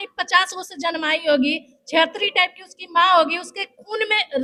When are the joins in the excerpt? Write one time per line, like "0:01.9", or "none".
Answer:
none